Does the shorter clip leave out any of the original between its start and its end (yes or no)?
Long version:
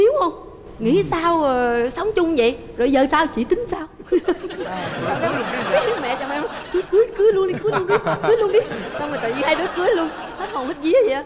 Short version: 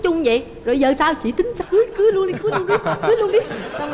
yes